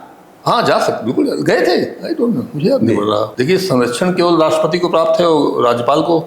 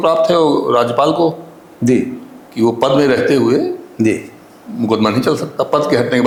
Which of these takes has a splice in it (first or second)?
first